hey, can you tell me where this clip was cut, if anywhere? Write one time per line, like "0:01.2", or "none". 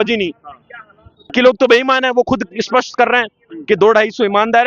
0:01.3